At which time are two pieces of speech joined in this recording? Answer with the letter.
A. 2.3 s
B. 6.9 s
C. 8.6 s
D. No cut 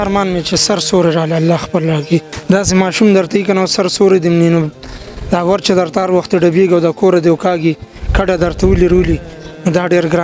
A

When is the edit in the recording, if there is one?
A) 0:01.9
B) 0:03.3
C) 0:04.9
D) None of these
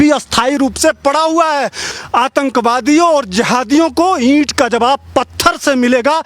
A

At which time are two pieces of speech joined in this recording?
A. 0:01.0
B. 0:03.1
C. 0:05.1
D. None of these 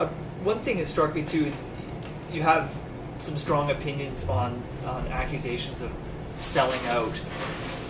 D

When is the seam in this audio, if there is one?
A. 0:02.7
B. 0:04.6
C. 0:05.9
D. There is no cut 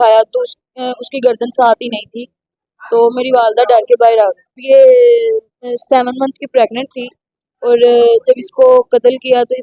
B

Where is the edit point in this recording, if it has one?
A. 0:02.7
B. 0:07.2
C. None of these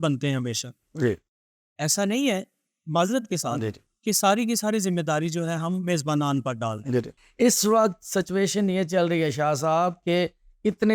B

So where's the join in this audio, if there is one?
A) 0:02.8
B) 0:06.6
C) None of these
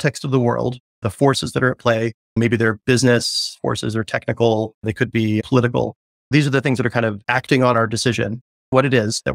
C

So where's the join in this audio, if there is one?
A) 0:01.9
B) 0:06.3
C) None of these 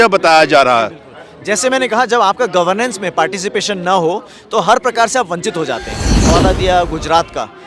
B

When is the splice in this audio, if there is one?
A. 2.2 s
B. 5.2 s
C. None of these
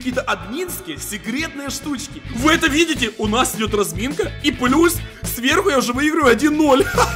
A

